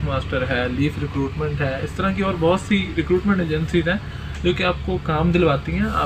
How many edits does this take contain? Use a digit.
0